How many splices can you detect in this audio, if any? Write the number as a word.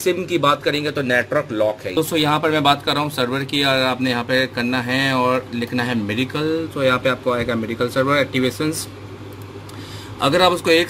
one